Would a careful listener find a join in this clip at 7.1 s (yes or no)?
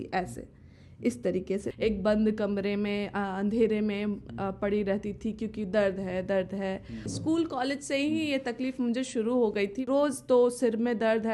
yes